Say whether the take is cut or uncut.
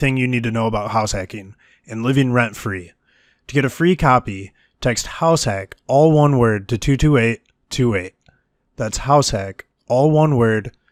uncut